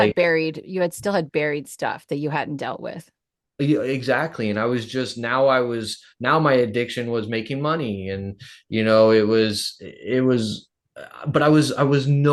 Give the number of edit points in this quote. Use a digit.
0